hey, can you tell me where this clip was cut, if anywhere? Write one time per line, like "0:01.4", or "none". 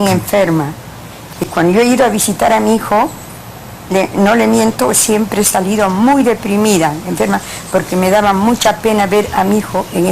0:08.8